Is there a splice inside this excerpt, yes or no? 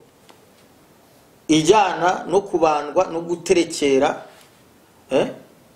no